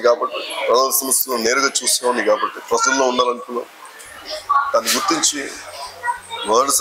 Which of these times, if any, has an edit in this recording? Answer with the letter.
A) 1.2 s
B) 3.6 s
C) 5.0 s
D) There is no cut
D